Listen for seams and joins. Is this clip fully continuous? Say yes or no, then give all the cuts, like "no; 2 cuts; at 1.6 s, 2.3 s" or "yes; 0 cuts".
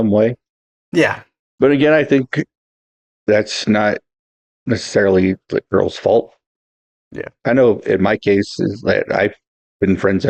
yes; 0 cuts